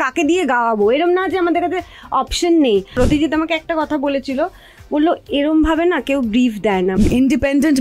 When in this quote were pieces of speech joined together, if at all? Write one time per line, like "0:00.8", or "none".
0:03.0
0:06.9